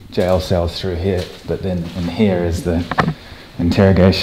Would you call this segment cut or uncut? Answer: uncut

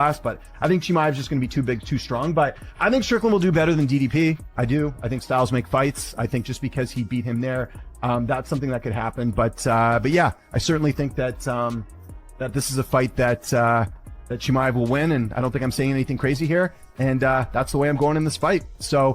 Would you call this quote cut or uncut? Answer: cut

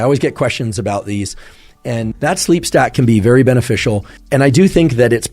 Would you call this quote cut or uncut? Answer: cut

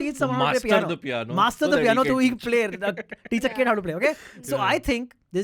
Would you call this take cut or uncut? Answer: uncut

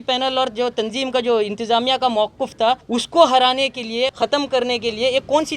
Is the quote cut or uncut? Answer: cut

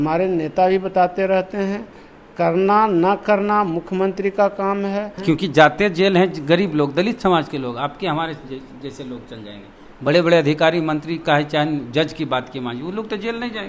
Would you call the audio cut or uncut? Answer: cut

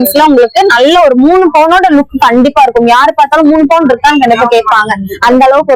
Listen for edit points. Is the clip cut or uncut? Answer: uncut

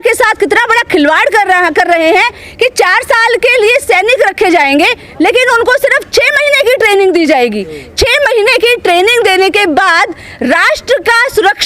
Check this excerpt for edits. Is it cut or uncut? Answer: uncut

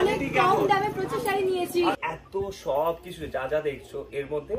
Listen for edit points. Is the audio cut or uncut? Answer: cut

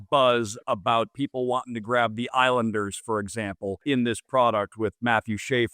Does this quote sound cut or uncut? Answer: cut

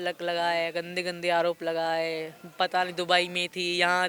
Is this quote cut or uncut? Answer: uncut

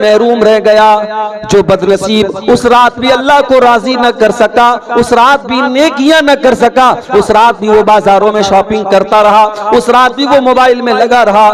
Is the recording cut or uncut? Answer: uncut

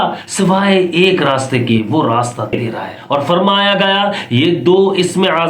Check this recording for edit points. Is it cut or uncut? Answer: cut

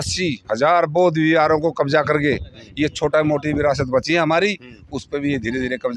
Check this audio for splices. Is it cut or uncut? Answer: uncut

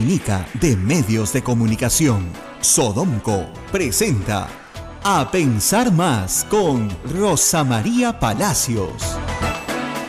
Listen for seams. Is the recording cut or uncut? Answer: uncut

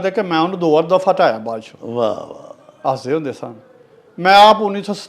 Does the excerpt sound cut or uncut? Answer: uncut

